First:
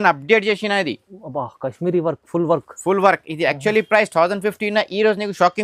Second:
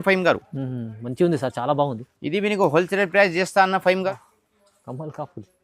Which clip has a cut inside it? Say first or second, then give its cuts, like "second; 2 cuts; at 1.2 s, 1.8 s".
second; 1 cut; at 4.1 s